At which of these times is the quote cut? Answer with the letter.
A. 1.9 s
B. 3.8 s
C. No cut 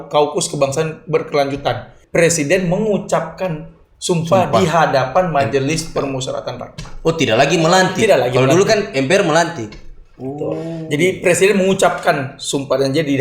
A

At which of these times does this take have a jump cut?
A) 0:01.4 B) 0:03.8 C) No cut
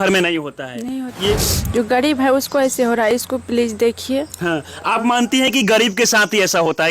A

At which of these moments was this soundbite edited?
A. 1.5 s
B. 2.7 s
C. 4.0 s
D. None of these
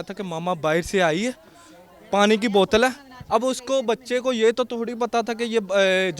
D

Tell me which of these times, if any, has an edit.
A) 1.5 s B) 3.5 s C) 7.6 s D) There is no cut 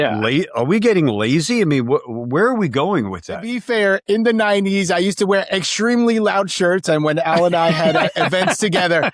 B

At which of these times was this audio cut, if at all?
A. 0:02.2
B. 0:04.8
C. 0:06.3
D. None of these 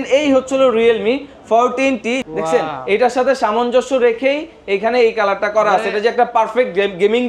A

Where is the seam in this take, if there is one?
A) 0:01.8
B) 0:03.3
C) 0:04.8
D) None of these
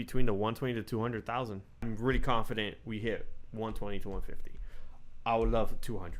A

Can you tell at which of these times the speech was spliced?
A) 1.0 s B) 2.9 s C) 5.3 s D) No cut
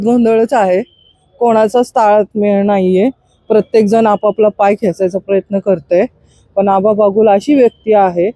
D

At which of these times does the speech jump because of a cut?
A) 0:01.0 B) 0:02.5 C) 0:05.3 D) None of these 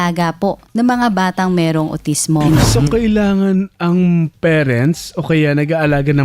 B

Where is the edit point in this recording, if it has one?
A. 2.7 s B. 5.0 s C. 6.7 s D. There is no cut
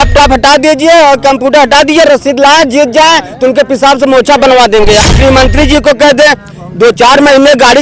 B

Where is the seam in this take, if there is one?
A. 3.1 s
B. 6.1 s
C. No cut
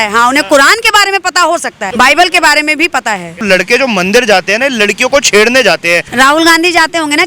B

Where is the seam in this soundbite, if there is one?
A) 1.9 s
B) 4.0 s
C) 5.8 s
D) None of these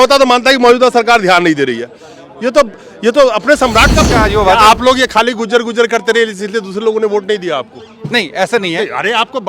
B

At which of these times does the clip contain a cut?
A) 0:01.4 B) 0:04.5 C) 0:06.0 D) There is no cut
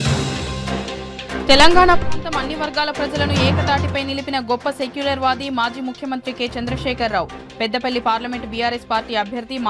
A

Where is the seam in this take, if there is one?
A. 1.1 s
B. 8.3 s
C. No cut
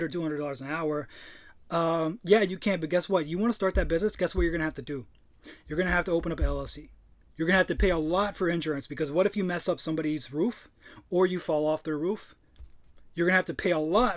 C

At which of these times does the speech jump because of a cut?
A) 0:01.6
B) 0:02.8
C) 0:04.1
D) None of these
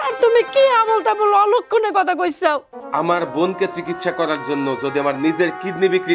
B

